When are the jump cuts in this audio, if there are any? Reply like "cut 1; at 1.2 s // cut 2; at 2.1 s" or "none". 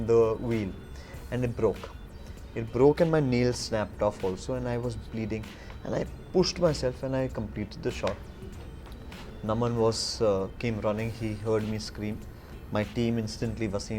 none